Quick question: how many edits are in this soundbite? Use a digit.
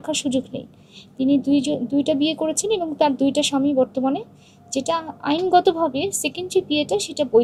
0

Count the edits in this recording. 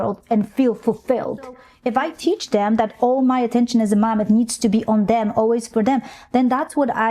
1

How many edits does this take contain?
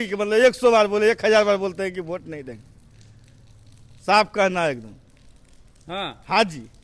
0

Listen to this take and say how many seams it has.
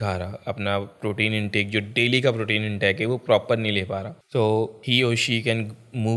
2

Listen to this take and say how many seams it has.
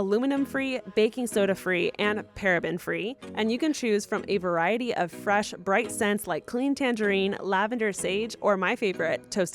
1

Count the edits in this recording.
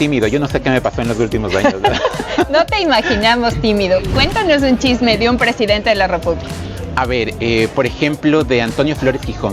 1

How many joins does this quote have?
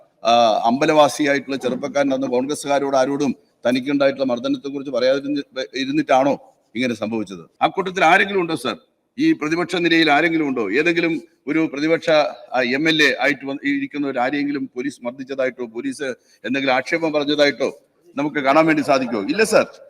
1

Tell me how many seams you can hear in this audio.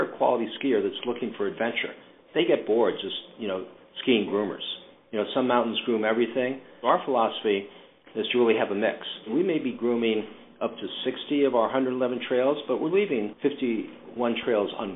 4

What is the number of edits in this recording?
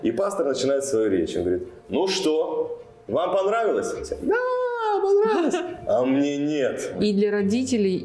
1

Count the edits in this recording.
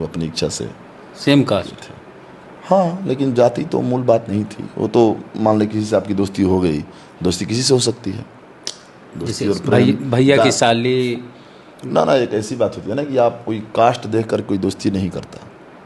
0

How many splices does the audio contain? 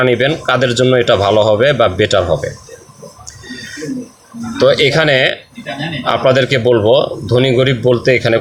0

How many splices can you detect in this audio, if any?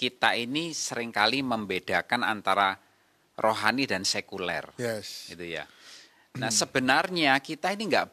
0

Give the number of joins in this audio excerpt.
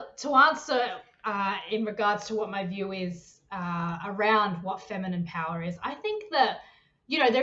0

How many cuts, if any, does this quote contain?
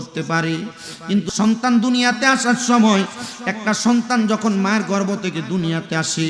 1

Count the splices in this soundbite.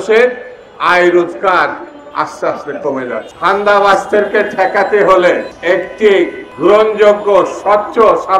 3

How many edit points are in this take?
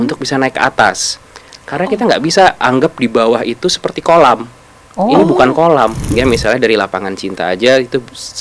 1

